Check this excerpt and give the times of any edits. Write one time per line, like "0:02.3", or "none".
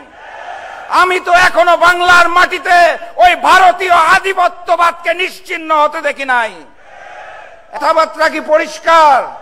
0:07.8